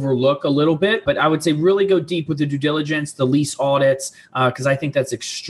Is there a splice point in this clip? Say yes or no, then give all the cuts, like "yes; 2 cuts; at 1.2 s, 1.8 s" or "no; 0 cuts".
yes; 1 cut; at 1.0 s